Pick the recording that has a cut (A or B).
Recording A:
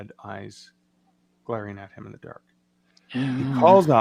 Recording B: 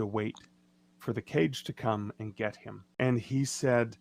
B